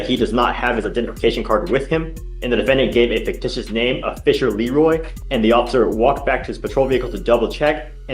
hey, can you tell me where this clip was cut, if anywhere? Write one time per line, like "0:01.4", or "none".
0:05.1